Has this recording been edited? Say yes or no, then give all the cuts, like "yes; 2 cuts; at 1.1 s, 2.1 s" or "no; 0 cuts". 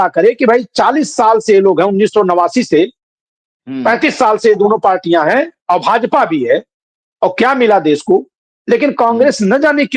no; 0 cuts